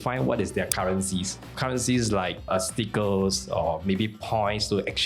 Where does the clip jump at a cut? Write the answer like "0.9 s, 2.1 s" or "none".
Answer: 1.5 s